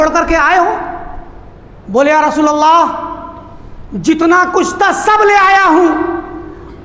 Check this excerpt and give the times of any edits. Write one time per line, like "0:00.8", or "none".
none